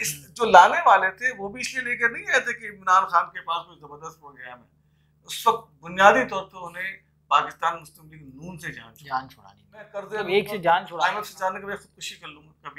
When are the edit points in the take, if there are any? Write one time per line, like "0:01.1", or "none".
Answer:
0:10.9